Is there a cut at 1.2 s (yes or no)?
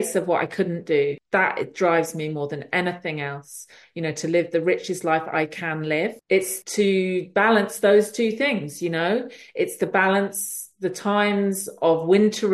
yes